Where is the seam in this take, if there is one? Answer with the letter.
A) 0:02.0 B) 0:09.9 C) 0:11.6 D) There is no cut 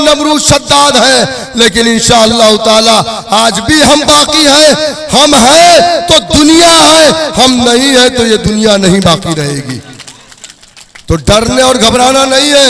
D